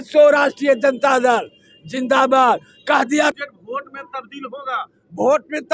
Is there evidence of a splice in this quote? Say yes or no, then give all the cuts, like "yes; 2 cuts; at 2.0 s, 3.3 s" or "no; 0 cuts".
yes; 1 cut; at 3.4 s